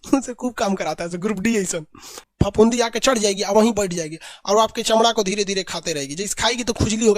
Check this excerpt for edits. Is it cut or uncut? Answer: cut